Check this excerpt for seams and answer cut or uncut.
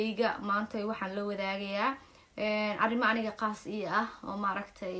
uncut